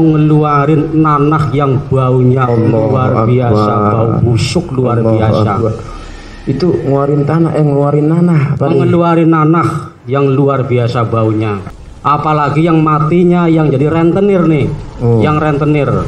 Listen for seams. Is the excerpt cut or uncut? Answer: cut